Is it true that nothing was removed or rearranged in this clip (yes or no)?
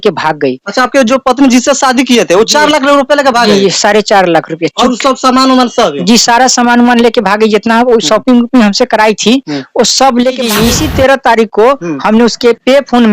no